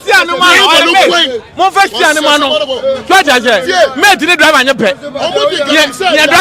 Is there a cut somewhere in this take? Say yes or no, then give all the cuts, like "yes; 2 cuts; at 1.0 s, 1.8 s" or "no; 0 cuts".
no; 0 cuts